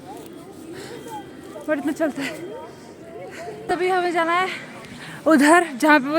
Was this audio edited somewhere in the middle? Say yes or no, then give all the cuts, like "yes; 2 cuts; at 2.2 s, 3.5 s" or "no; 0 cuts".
yes; 1 cut; at 3.6 s